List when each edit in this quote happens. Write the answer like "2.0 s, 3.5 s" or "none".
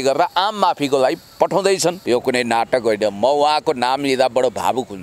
2.0 s